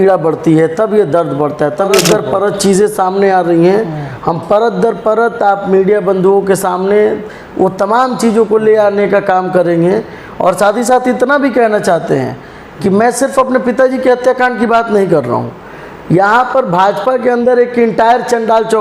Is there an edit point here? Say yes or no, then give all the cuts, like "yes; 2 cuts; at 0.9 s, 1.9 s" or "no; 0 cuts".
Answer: yes; 1 cut; at 2.0 s